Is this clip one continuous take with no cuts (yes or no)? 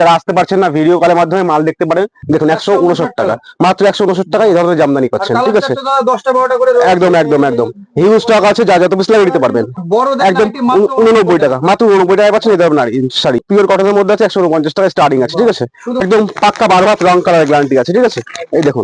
no